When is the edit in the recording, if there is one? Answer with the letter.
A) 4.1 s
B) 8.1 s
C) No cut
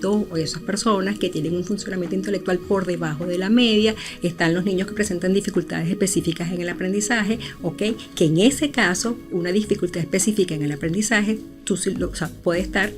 A